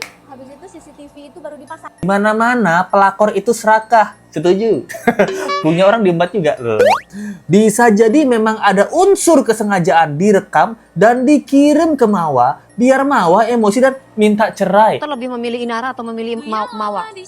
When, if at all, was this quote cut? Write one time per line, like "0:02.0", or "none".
0:02.1
0:15.1